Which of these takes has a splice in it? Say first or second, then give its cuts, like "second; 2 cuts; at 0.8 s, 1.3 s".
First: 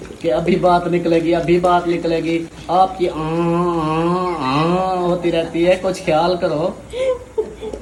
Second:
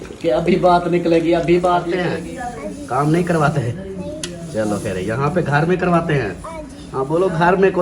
second; 1 cut; at 2.0 s